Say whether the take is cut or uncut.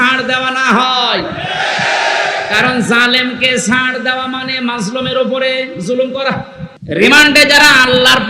cut